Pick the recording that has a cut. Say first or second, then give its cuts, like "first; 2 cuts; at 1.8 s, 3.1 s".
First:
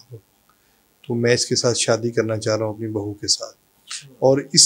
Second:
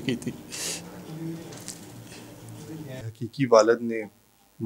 second; 1 cut; at 3.2 s